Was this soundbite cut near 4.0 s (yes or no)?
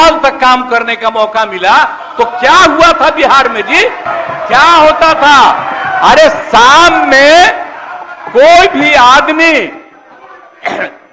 no